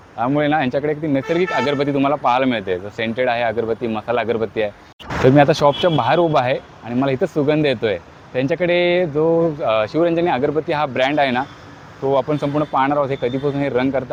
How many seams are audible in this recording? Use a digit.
0